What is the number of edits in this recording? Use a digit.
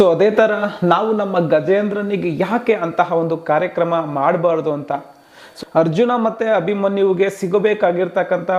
1